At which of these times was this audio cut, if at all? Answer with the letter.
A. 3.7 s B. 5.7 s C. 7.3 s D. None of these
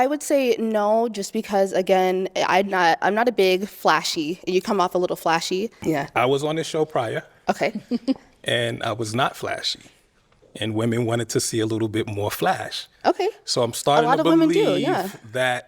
B